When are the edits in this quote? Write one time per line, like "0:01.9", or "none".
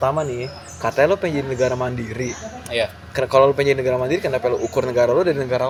none

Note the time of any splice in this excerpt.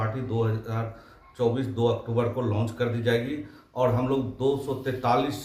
none

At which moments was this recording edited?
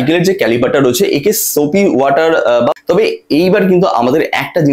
0:02.7

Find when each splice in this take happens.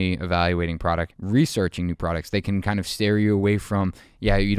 0:01.1

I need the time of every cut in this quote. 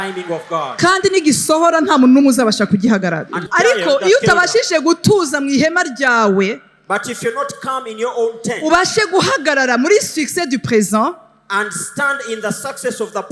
0:03.5

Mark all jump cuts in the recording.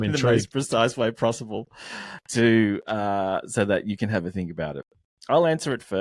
none

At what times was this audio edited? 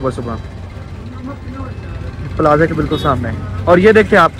none

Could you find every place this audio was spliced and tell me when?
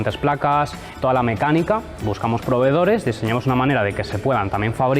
0:02.0

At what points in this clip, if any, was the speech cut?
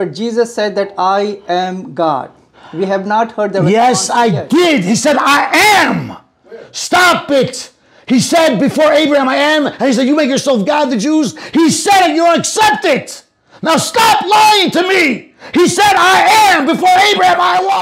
none

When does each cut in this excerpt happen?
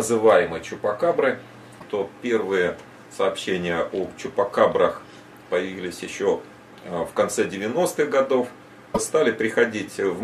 0:01.7
0:09.0

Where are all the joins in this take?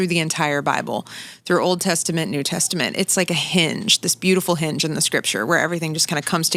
none

